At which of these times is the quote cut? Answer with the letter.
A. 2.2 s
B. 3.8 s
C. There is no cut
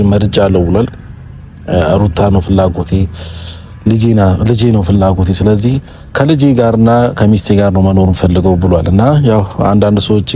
C